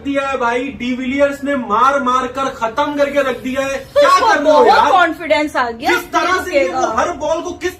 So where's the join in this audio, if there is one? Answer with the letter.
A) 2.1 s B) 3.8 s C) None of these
B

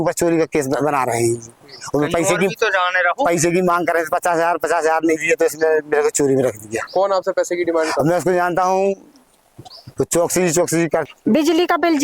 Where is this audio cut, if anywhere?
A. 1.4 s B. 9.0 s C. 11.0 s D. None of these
C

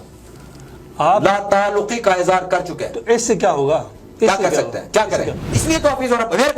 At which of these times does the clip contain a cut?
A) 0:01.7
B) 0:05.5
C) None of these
B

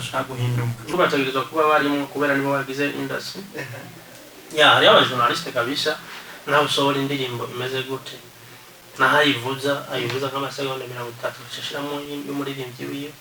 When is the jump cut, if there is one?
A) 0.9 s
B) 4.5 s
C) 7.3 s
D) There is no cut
A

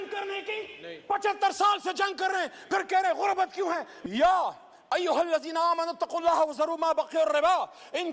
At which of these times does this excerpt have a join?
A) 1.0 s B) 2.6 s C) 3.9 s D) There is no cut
C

